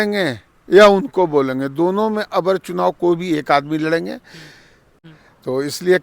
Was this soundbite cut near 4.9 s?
yes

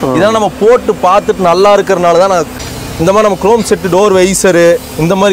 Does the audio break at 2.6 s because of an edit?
yes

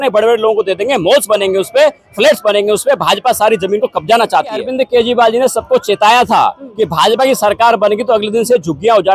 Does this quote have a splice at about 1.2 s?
no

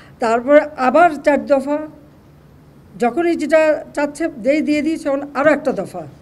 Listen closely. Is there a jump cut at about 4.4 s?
yes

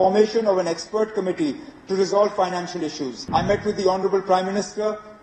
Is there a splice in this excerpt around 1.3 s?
no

